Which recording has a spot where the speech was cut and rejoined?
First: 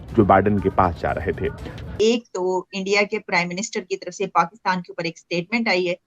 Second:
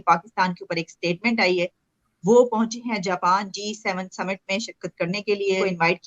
first; 1 cut; at 1.9 s

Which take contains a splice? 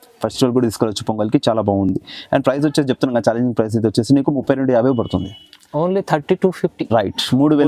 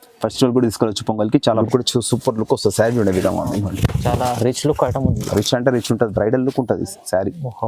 second; 1 cut; at 1.6 s

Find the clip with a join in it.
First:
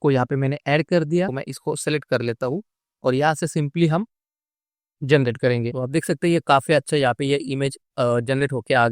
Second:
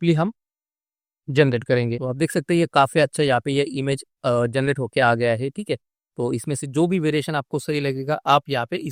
first; 1 cut; at 1.3 s

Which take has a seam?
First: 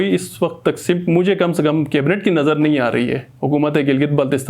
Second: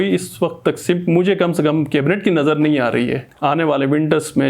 second; 1 cut; at 3.3 s

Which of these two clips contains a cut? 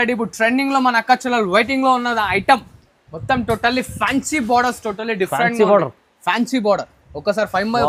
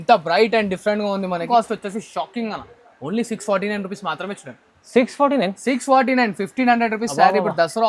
second; 1 cut; at 1.5 s

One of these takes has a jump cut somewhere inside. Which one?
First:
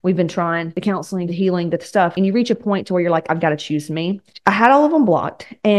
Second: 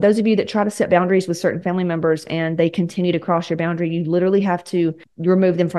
first; 3 cuts; at 1.0 s, 2.1 s, 4.2 s

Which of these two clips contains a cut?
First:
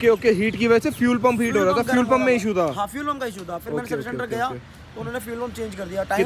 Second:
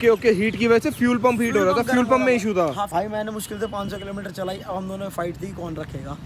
second; 1 cut; at 2.9 s

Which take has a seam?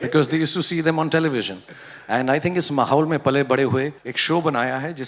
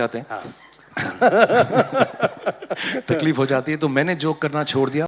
first; 1 cut; at 4.1 s

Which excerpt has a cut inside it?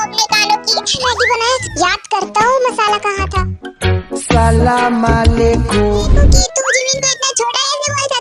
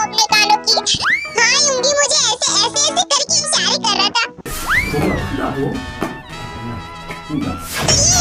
first; 2 cuts; at 1.0 s, 6.1 s

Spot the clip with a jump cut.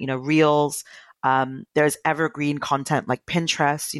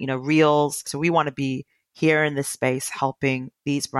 second; 1 cut; at 0.9 s

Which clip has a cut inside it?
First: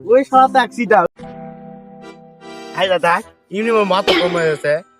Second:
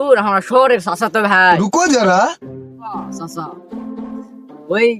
first; 1 cut; at 1.1 s

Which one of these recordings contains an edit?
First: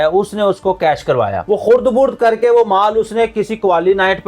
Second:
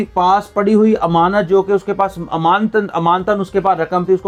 first; 1 cut; at 1.4 s

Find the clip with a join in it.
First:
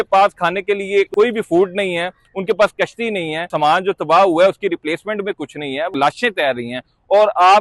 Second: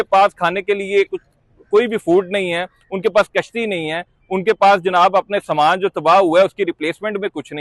first; 3 cuts; at 1.1 s, 3.5 s, 5.9 s

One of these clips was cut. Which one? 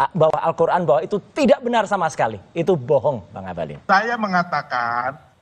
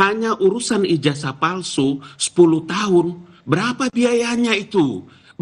first; 1 cut; at 3.7 s

